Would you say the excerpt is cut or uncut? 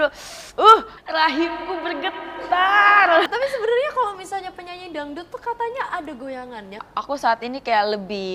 cut